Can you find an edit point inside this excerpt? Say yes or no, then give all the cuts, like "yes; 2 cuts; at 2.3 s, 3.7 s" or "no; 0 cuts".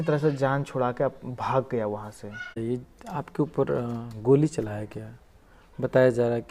yes; 1 cut; at 2.5 s